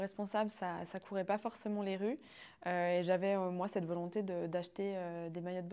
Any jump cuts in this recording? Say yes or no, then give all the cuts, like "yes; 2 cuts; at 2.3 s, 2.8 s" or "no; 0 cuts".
no; 0 cuts